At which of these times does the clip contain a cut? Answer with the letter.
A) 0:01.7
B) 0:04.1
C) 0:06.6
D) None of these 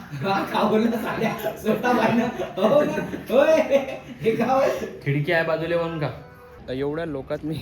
C